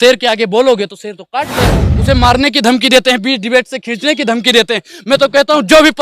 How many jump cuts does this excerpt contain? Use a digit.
1